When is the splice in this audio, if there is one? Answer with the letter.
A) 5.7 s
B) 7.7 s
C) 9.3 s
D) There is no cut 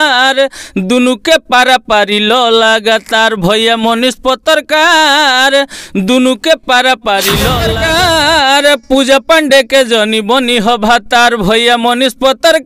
B